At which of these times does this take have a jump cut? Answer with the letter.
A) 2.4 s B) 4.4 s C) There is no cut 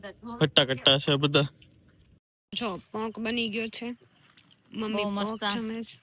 A